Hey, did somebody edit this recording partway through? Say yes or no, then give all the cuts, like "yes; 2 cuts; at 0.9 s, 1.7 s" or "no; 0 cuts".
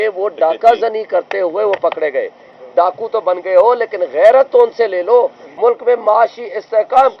yes; 2 cuts; at 2.6 s, 5.4 s